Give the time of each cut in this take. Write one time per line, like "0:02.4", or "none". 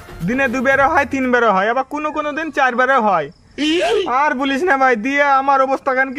none